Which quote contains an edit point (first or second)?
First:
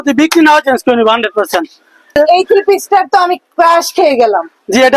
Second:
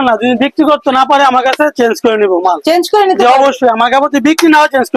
first